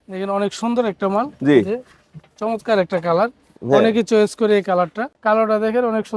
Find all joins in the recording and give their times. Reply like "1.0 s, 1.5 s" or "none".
5.1 s